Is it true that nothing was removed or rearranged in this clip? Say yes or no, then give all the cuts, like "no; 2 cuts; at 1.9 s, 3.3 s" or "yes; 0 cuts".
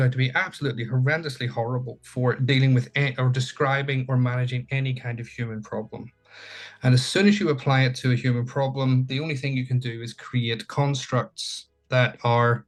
yes; 0 cuts